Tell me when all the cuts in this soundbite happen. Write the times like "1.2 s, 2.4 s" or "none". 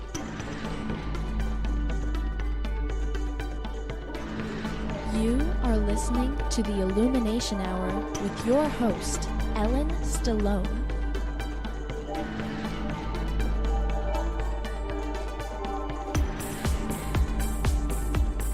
none